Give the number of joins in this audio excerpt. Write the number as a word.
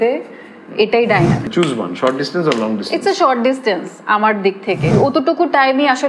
two